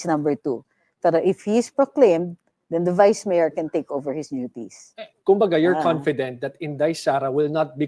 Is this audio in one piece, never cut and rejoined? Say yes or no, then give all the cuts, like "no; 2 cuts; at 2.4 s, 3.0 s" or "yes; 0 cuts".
no; 1 cut; at 5.1 s